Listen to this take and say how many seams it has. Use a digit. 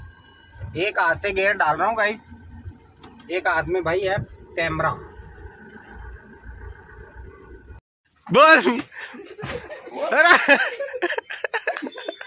1